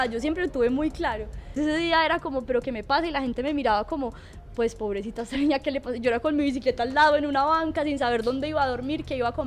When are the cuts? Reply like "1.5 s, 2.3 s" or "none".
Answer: 1.6 s